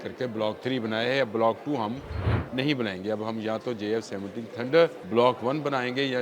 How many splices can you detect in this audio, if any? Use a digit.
1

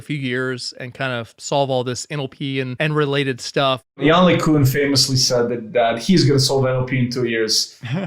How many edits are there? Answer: 2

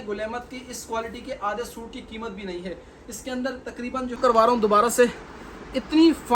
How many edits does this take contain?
1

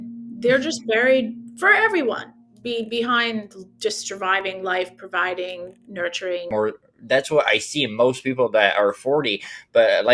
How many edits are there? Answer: 1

